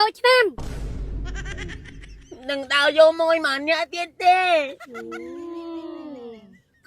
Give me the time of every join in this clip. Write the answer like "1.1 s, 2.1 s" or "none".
2.1 s